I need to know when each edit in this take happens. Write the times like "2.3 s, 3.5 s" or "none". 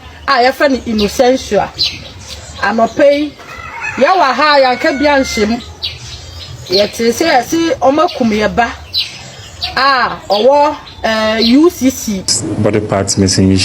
12.4 s